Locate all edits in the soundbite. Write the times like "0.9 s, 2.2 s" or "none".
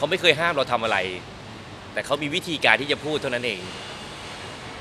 none